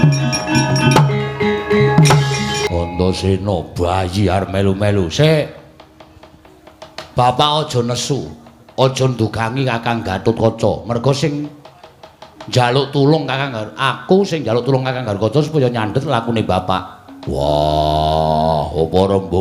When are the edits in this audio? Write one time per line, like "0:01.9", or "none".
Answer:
0:02.6